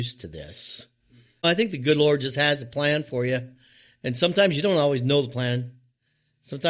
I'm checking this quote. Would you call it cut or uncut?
cut